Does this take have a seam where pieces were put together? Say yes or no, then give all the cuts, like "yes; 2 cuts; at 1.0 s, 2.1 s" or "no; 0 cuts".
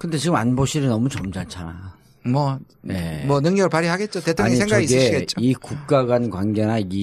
yes; 1 cut; at 1.1 s